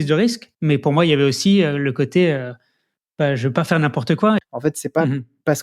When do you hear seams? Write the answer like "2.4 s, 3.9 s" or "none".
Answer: 4.4 s